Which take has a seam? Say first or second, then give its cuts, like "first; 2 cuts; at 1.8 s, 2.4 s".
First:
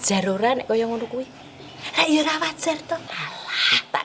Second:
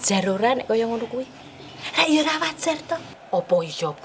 first; 1 cut; at 3.1 s